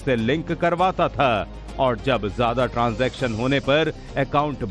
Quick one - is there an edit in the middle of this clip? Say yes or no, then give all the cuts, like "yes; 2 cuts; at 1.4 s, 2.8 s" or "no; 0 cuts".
no; 0 cuts